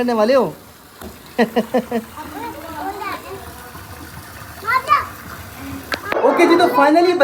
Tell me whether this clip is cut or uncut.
uncut